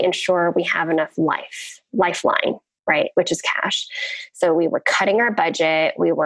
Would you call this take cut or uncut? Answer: uncut